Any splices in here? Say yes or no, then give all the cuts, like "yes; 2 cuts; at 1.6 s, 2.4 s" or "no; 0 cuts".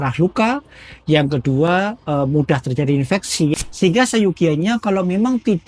yes; 1 cut; at 3.5 s